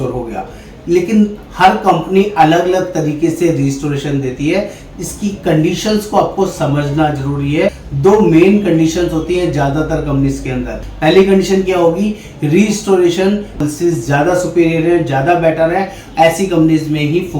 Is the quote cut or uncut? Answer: cut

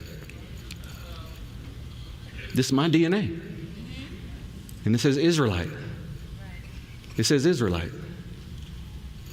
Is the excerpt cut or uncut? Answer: uncut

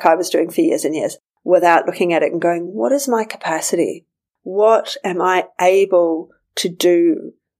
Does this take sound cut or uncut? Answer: cut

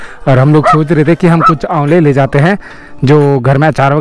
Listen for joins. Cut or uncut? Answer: uncut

